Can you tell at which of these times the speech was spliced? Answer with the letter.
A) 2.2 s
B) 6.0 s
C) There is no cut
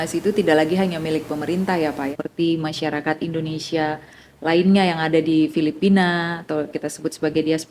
A